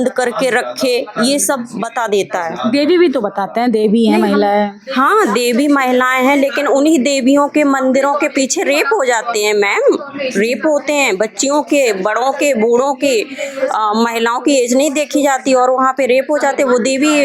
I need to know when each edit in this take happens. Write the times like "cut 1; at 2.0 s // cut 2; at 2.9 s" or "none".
none